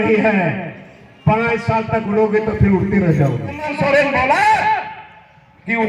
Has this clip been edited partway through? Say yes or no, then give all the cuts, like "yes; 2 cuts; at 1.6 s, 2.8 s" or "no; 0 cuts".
yes; 1 cut; at 3.7 s